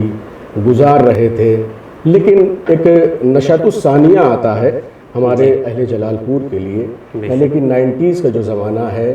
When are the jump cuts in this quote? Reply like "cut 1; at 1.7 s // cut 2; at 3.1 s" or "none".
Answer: none